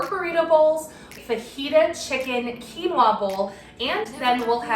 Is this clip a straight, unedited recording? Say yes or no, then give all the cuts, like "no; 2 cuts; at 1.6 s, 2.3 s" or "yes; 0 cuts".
no; 1 cut; at 1.2 s